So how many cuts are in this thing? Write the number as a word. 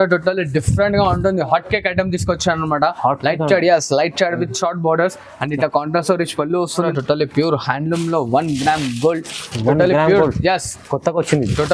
one